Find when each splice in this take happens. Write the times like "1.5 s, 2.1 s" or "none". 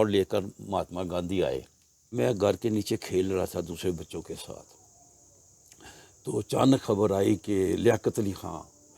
2.1 s